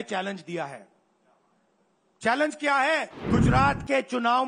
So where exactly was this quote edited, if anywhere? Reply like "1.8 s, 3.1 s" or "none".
3.1 s